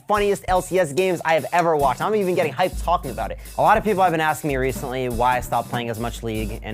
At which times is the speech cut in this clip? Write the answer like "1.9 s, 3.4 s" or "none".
3.4 s

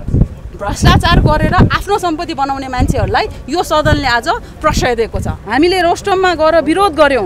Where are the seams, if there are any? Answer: 5.4 s

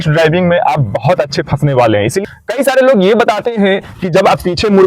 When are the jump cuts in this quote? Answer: 2.2 s

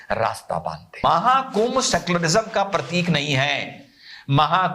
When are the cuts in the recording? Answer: 1.0 s

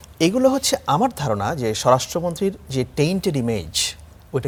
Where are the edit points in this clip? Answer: none

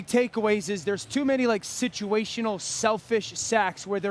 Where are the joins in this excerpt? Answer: none

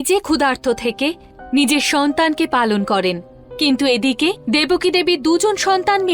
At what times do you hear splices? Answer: none

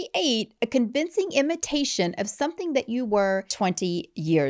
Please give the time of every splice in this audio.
3.5 s

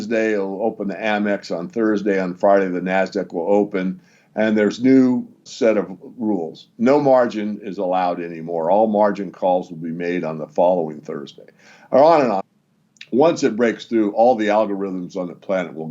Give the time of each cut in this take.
12.4 s

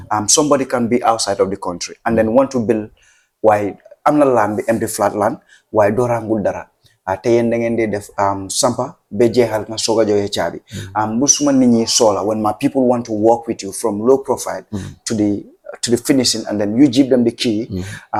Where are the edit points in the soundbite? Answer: none

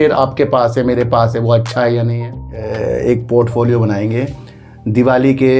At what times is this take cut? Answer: 2.6 s

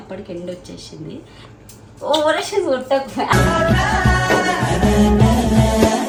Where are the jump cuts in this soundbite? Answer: none

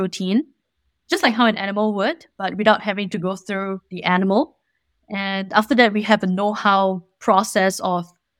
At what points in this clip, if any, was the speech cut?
none

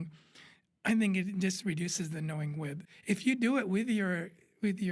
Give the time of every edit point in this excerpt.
2.8 s

